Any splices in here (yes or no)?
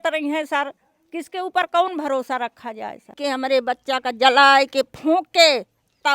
yes